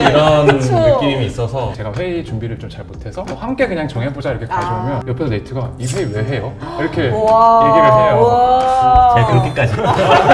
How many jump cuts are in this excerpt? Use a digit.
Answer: 3